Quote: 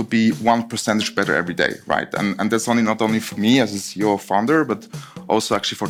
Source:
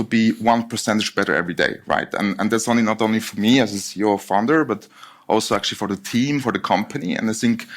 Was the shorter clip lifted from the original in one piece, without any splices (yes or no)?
yes